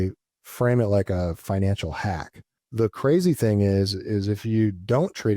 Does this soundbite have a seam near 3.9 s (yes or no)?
no